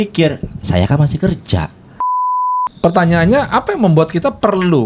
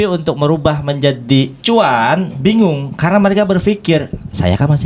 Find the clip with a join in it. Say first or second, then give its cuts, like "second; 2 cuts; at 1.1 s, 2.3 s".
first; 1 cut; at 2.1 s